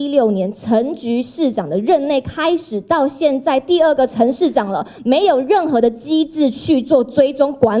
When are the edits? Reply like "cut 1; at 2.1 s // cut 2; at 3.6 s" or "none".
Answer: none